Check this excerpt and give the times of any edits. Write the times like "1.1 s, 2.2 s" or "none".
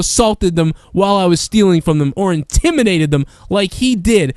1.4 s